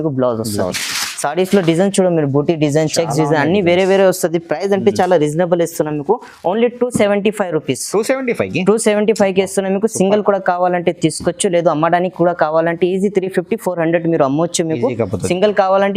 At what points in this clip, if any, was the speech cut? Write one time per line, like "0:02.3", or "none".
none